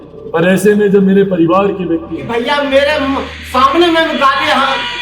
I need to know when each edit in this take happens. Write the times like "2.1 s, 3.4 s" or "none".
2.2 s

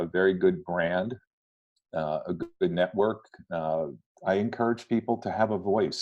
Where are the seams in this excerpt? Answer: 4.0 s

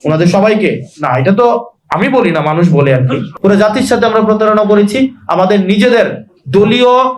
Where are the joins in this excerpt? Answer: 3.3 s

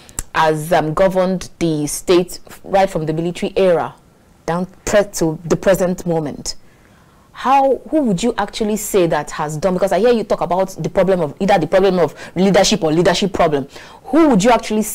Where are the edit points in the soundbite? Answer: none

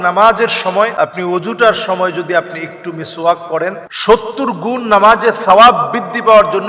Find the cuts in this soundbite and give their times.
0.9 s, 3.9 s

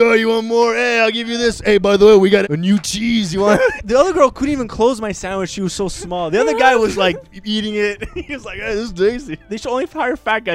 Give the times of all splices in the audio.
2.4 s, 3.8 s, 9.4 s

